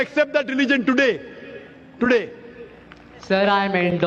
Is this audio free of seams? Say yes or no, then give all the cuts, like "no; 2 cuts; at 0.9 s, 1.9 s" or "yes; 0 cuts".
yes; 0 cuts